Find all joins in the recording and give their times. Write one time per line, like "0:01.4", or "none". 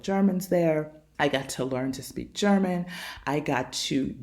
0:01.0